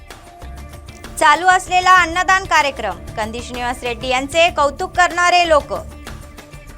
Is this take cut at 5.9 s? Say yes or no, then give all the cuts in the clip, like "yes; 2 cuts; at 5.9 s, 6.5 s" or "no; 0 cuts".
yes; 1 cut; at 5.9 s